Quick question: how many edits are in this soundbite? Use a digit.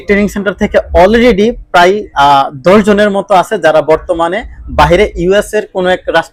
0